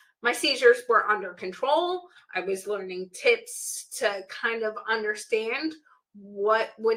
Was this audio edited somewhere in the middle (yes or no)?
no